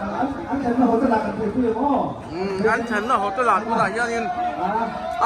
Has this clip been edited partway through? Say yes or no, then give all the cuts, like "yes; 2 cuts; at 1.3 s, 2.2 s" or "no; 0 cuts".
no; 0 cuts